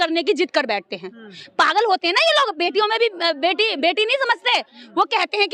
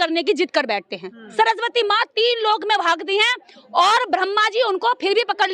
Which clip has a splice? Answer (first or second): second